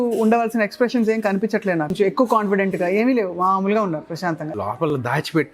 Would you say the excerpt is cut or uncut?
cut